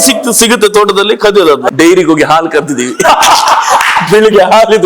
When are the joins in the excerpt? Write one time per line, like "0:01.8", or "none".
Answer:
0:01.7